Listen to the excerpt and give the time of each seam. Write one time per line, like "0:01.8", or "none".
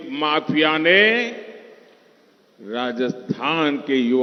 none